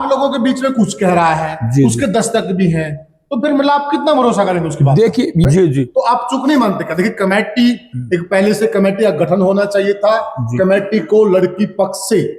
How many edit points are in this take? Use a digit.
1